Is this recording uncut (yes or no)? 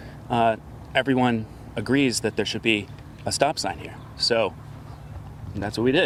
yes